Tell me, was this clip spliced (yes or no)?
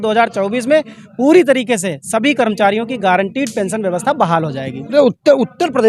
yes